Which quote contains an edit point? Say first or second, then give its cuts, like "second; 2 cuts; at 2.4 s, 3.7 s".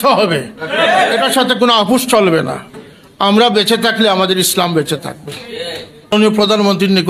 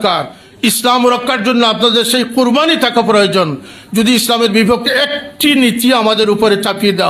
first; 1 cut; at 6.1 s